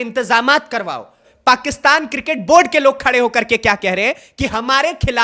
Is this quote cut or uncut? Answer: cut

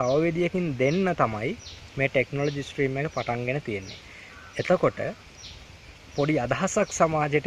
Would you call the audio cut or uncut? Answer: uncut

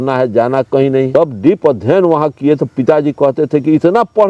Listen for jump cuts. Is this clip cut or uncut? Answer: cut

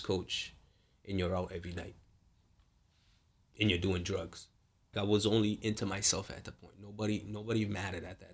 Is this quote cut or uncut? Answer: cut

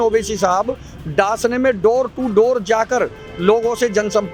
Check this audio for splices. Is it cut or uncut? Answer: uncut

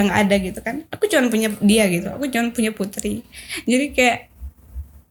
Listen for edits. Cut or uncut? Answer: uncut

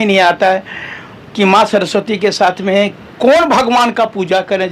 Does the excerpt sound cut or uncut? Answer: uncut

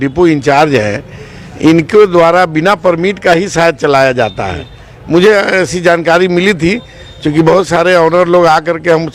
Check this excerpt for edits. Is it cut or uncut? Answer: uncut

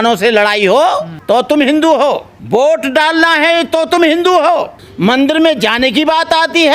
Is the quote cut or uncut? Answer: cut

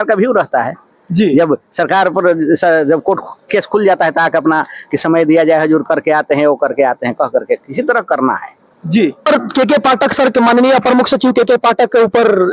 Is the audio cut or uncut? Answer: cut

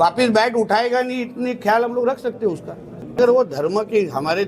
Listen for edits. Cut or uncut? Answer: cut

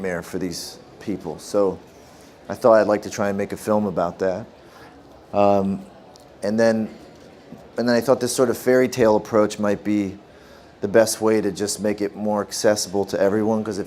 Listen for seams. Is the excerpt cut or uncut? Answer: cut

